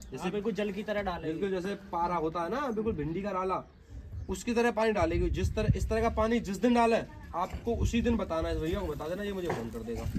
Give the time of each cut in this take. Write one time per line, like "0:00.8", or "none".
none

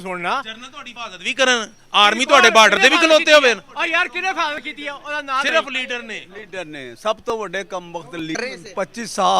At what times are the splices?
0:08.4

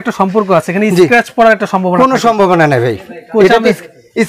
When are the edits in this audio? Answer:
none

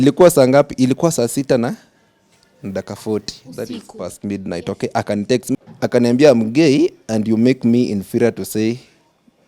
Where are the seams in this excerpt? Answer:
0:05.6

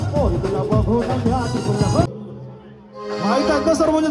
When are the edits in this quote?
0:02.1

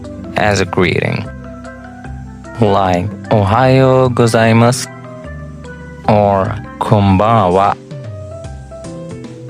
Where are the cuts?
0:07.8

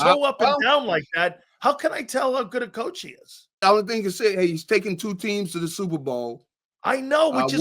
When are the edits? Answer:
0:03.6

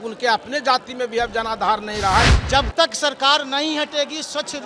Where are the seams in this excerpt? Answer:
0:02.3

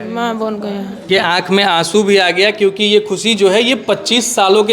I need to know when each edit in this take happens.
0:01.0

